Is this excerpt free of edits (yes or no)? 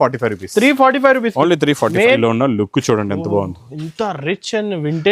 no